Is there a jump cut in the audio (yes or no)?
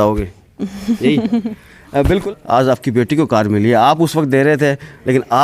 yes